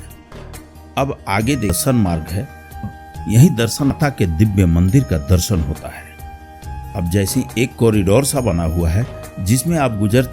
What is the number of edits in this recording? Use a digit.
3